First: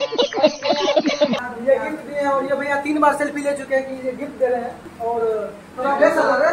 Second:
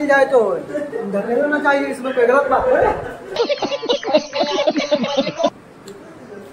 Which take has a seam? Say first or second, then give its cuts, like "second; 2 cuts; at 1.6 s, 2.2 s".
first; 2 cuts; at 1.4 s, 4.8 s